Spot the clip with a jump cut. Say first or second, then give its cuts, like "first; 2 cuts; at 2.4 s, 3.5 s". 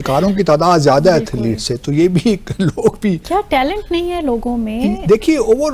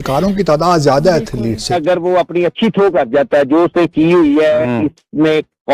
second; 1 cut; at 1.8 s